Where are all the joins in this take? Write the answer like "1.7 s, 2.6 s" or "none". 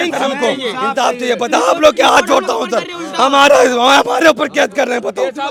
none